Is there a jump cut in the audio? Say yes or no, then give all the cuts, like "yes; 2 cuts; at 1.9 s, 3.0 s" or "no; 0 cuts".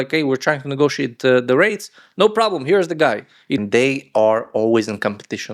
yes; 1 cut; at 3.6 s